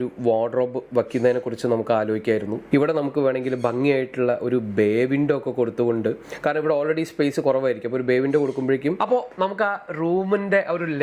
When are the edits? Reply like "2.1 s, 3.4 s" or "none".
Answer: 2.6 s, 9.0 s

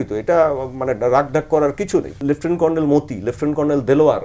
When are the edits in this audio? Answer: 2.2 s

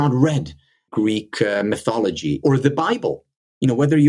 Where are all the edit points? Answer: 0.9 s, 2.4 s

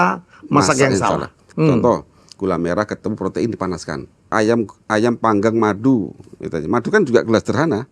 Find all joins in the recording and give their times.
1.4 s, 4.3 s

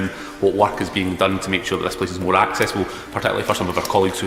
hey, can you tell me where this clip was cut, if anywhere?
none

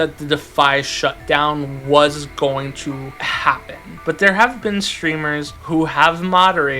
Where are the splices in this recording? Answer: 3.9 s, 5.5 s

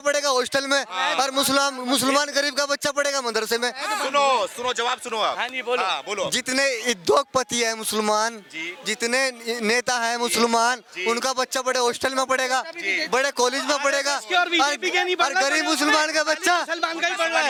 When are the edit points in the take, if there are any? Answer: none

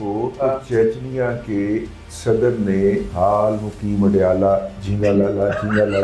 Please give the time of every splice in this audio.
3.1 s

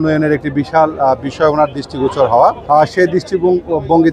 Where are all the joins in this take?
2.6 s

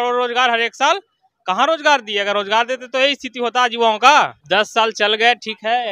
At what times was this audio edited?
4.4 s

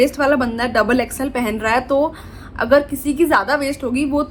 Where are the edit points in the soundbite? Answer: none

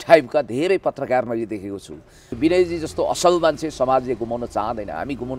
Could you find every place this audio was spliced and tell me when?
2.2 s

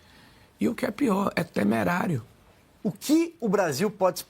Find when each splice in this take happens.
2.7 s

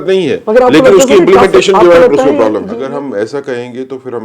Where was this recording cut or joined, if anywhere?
2.8 s

